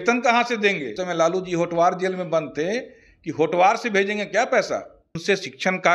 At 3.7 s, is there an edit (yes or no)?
no